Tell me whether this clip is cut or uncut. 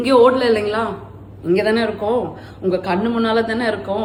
uncut